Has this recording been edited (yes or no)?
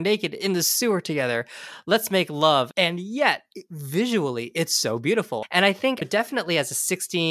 yes